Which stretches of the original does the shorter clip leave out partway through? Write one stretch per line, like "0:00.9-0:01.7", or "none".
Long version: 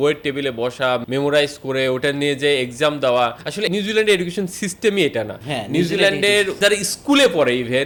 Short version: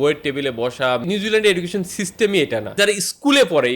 0:01.1-0:03.7
0:05.3-0:06.5